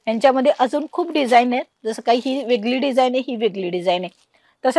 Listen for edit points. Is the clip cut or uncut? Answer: uncut